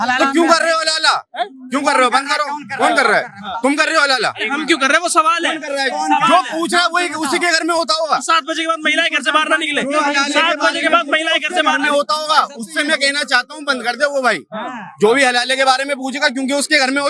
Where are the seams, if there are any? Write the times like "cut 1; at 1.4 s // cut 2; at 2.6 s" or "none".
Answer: none